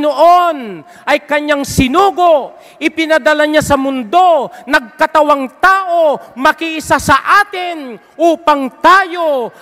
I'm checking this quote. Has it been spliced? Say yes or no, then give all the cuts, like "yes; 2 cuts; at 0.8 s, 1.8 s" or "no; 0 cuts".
no; 0 cuts